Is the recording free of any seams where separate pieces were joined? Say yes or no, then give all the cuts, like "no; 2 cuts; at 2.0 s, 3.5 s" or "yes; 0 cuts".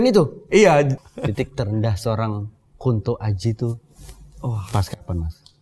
no; 1 cut; at 0.9 s